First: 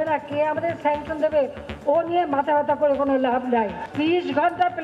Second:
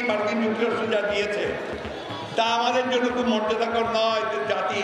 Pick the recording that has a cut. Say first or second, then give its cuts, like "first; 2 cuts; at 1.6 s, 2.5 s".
first; 1 cut; at 3.8 s